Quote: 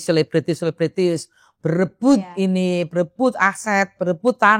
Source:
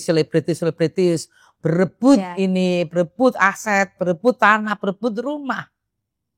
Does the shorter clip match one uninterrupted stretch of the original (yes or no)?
yes